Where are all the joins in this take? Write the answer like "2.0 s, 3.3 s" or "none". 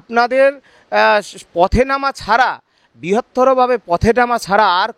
none